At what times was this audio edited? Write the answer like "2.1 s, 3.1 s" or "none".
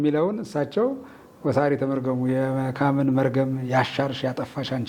none